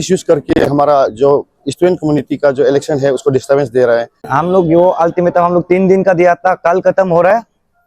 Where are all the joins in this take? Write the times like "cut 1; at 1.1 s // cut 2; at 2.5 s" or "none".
cut 1; at 4.3 s